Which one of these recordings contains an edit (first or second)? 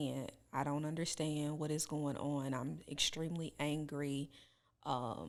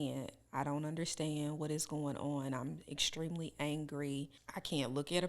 second